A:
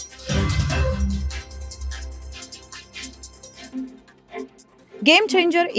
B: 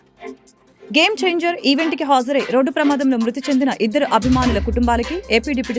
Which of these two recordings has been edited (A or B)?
A